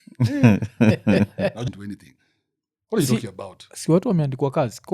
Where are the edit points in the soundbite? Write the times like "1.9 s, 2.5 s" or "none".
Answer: 1.6 s